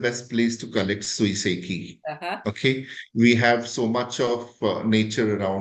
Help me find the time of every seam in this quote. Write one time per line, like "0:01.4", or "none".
none